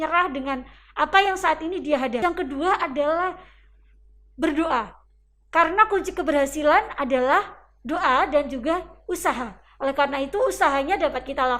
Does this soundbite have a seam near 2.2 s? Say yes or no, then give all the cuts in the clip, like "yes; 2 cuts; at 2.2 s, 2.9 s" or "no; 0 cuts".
yes; 1 cut; at 2.2 s